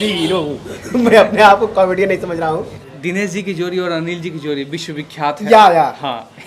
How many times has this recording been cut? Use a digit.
1